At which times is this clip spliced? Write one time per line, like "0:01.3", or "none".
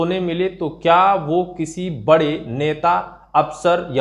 none

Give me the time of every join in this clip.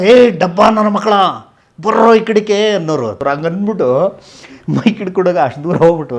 0:03.2

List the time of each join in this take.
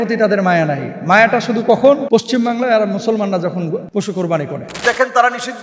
0:02.0
0:03.9
0:04.8

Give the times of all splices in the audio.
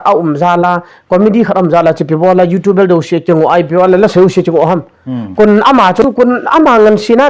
0:06.2

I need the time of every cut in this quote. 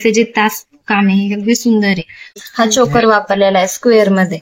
0:02.4

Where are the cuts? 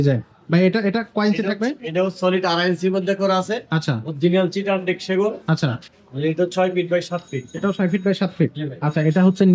none

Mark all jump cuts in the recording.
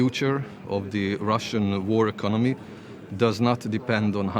none

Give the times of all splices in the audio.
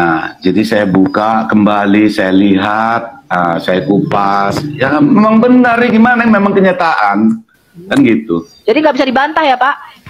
none

